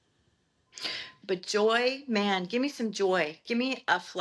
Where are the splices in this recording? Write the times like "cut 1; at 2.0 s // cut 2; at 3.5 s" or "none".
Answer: cut 1; at 1.0 s